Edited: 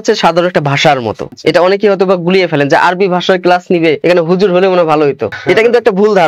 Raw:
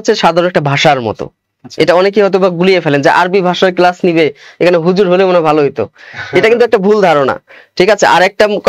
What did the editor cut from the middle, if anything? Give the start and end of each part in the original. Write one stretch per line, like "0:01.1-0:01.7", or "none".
0:01.2-0:01.6
0:04.3-0:04.6
0:05.9-0:06.2

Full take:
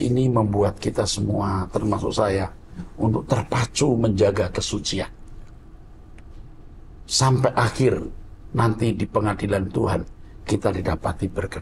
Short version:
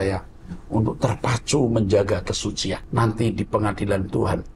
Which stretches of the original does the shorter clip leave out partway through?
0:05.1-0:08.5

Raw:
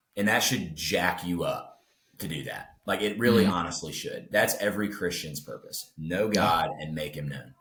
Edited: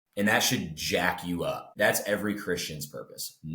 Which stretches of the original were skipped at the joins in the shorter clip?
0:01.7-0:04.2

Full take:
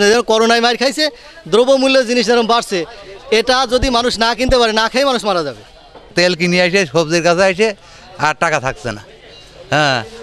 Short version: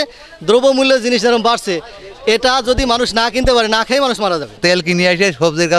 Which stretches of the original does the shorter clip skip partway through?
0:05.5-0:06.0

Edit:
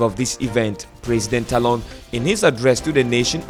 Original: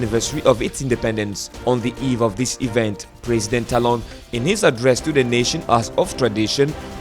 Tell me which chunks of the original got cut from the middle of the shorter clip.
none

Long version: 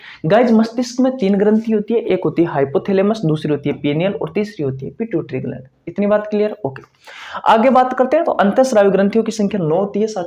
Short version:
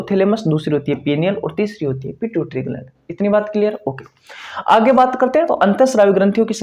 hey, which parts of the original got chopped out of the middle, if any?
none

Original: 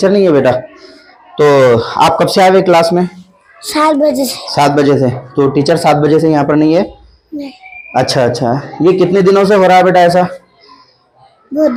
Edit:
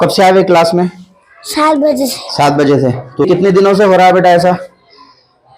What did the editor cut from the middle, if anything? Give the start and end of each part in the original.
0:05.4-0:09.0

